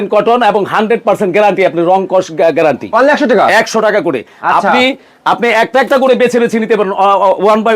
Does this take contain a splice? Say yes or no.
no